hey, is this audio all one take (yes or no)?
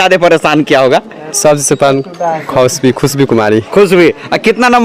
yes